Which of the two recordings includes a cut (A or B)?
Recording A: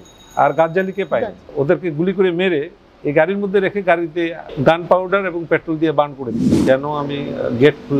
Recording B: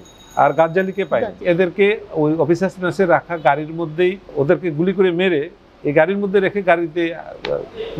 A